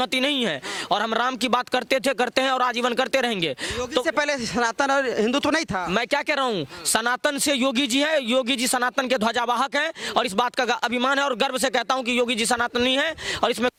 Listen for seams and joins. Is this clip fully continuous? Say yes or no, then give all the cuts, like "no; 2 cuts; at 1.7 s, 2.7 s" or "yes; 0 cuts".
yes; 0 cuts